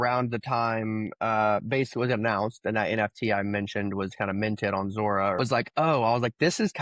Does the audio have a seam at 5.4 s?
yes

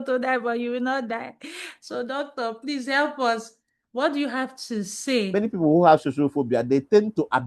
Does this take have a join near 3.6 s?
no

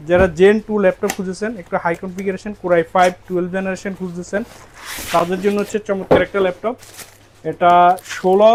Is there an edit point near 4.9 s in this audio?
no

